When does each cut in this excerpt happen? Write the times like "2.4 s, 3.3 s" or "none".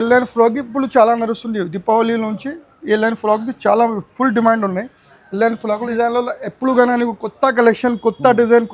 5.9 s